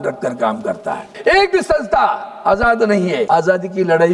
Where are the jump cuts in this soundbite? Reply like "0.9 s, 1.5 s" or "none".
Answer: 1.0 s, 3.2 s